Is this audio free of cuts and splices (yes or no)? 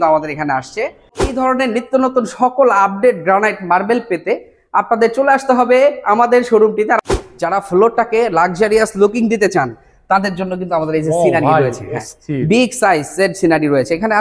no